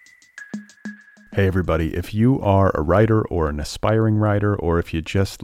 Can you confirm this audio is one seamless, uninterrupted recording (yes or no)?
no